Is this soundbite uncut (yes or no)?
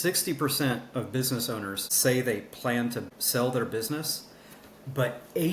no